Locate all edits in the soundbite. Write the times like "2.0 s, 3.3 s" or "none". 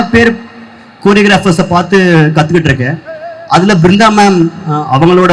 none